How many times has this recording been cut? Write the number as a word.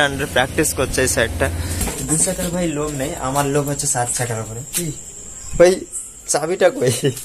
one